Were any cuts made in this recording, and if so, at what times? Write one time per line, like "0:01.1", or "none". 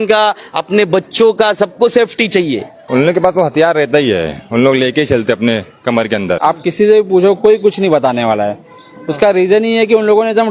0:02.7
0:06.4